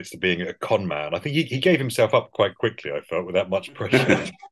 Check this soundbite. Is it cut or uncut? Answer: uncut